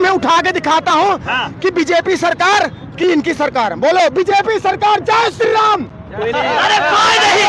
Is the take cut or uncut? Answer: uncut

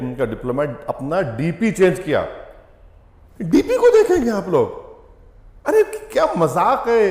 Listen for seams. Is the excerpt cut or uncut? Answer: uncut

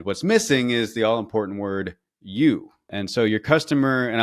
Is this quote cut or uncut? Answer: cut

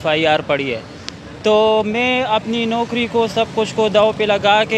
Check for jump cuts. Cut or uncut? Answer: uncut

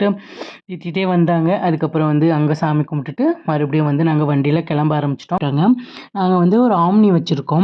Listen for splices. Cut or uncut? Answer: cut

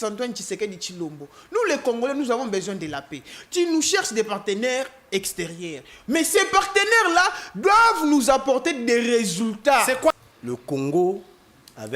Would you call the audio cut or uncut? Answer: cut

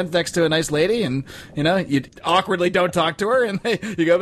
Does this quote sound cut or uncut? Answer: cut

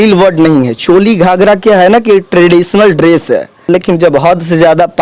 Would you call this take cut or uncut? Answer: cut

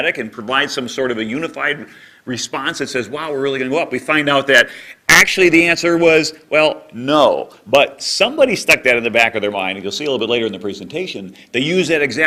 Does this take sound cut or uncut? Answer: uncut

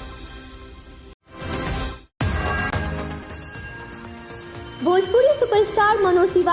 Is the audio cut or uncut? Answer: cut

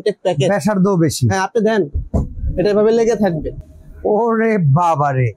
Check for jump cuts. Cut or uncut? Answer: uncut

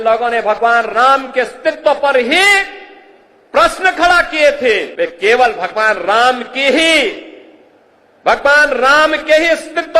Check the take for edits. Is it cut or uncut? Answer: cut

